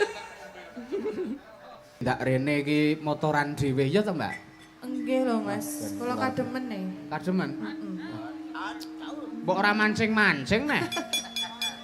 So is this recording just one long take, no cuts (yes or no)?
no